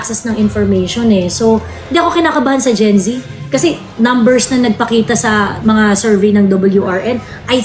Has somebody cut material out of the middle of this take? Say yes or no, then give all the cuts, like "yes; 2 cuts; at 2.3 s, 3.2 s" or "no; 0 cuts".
no; 0 cuts